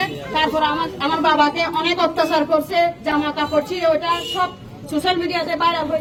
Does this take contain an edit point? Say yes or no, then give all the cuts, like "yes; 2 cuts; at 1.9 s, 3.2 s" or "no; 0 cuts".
no; 0 cuts